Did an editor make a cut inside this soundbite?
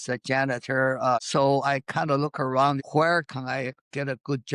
yes; 2 cuts; at 1.3 s, 2.8 s

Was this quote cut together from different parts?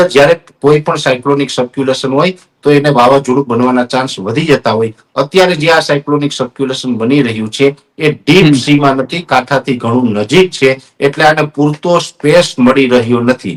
no; 0 cuts

